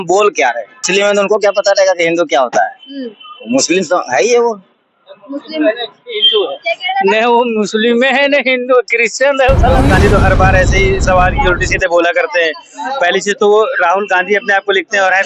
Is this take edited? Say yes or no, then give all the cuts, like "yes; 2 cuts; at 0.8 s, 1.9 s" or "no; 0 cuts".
yes; 1 cut; at 9.8 s